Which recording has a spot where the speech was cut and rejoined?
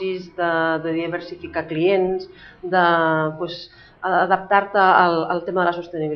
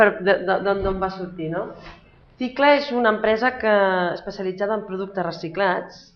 second; 1 cut; at 4.2 s

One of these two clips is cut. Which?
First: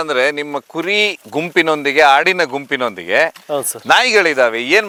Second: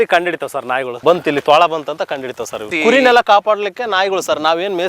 second; 2 cuts; at 0.9 s, 2.7 s

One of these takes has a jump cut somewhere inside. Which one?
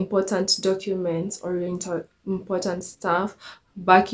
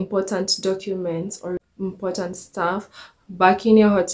second; 1 cut; at 1.6 s

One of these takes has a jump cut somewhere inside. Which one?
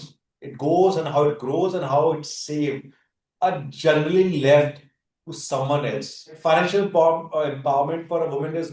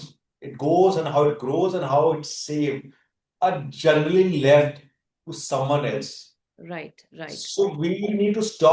first; 1 cut; at 6.4 s

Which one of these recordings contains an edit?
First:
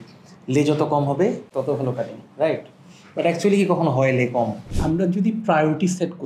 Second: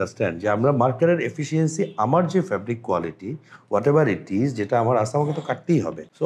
first; 1 cut; at 4.6 s

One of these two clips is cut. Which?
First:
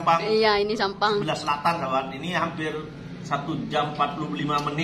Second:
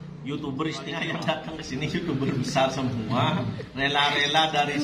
second; 1 cut; at 1.1 s

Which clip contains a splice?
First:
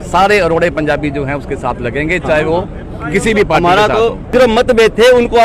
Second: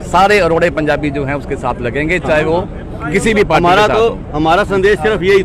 first; 1 cut; at 4.2 s

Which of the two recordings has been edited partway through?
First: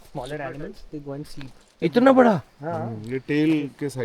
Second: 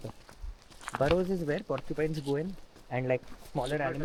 first; 1 cut; at 1.8 s

